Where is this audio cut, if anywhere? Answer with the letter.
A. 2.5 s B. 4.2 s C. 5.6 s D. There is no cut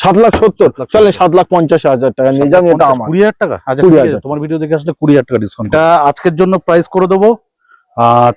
C